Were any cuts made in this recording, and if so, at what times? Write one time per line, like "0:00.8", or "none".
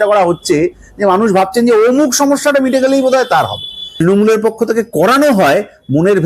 0:03.8

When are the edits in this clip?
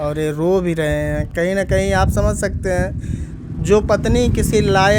none

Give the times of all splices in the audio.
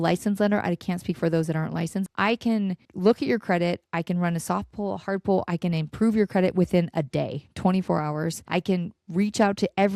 0:02.0
0:02.9
0:03.8
0:08.4

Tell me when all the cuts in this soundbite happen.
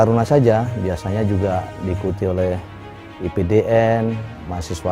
none

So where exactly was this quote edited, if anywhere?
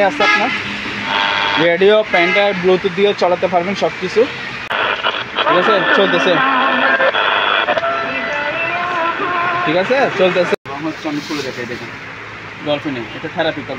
0:04.7
0:10.6

